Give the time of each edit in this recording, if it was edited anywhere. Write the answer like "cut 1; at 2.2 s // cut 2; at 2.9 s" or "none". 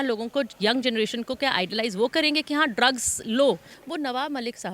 cut 1; at 3.8 s